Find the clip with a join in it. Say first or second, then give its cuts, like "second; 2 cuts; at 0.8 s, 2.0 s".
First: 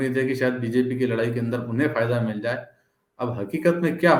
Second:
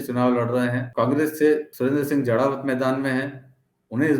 second; 2 cuts; at 0.8 s, 1.7 s